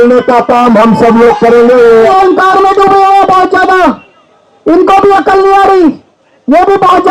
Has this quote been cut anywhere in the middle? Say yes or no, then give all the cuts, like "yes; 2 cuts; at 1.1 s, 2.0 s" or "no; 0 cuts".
yes; 1 cut; at 2.1 s